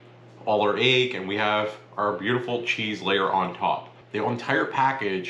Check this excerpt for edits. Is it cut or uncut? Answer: cut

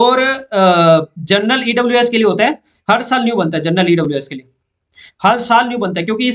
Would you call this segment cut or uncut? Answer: uncut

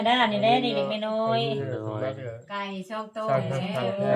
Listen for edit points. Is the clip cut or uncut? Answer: uncut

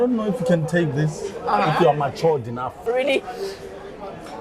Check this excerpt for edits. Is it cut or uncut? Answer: cut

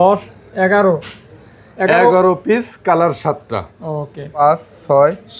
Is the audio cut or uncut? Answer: cut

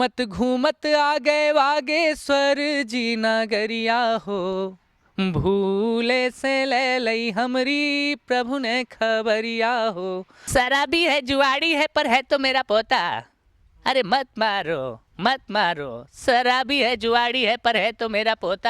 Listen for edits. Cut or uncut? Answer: cut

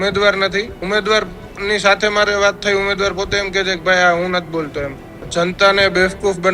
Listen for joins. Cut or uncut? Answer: cut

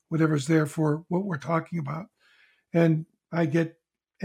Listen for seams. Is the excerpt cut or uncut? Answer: uncut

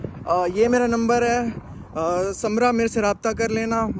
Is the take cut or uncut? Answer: uncut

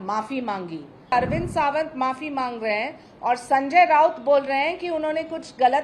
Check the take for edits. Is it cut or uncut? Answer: cut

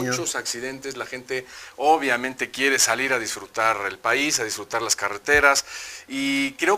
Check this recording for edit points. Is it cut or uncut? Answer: cut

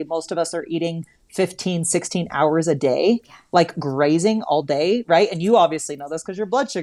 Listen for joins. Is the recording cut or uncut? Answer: uncut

